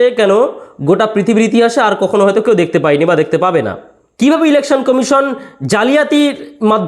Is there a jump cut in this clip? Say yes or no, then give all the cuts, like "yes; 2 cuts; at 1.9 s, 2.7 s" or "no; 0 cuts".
yes; 1 cut; at 4.1 s